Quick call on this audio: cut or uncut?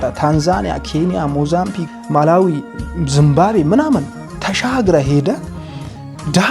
cut